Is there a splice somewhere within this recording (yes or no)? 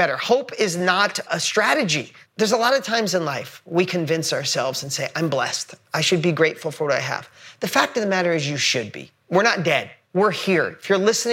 yes